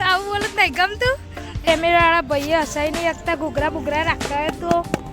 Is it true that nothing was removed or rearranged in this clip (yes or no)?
no